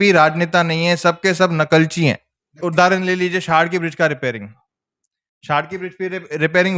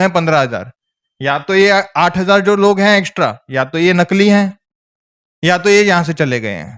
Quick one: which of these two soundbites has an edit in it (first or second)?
first